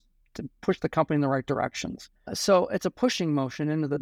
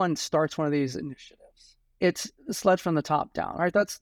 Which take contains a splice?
first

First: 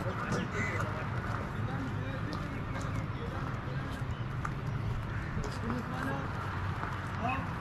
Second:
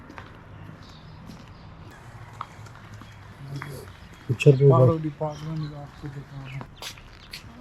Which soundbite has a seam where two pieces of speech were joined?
second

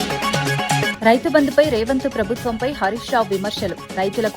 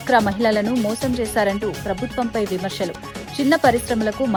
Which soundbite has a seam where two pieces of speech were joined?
first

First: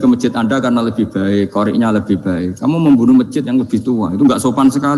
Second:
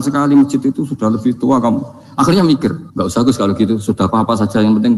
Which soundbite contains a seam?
second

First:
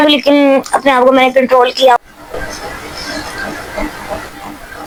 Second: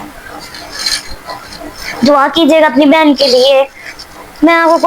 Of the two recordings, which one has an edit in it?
second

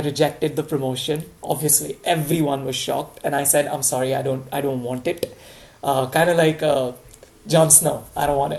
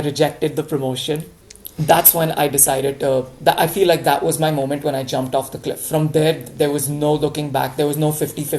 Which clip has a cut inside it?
second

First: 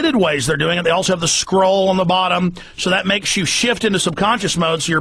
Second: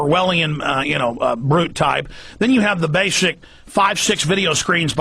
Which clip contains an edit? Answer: second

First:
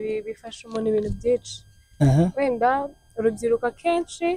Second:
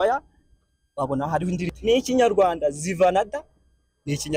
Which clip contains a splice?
second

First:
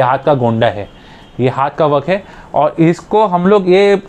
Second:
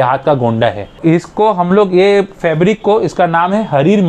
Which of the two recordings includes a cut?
second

